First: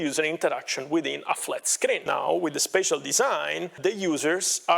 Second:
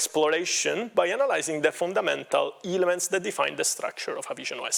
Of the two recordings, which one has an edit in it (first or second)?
first